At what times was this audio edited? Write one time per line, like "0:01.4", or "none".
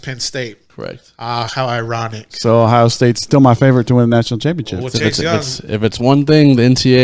0:03.2